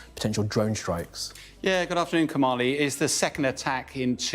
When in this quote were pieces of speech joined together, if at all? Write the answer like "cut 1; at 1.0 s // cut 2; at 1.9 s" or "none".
none

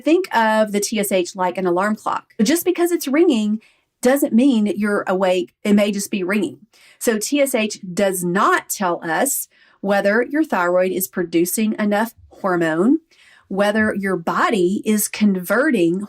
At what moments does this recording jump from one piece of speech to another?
cut 1; at 2.6 s // cut 2; at 5.5 s

